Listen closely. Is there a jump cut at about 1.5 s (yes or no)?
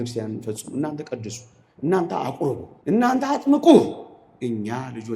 no